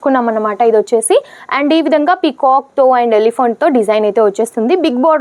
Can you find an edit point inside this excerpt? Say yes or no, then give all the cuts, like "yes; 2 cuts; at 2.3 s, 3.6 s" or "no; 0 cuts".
no; 0 cuts